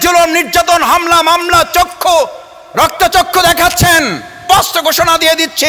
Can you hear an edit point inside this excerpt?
yes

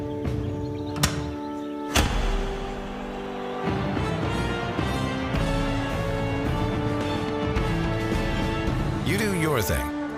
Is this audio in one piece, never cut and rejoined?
yes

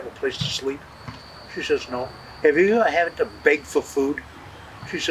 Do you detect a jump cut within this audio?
no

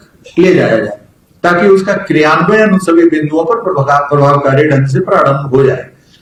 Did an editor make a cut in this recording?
no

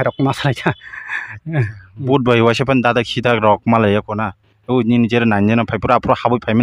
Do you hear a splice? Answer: no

